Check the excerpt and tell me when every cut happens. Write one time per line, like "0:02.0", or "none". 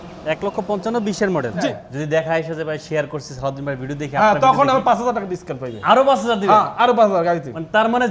0:01.7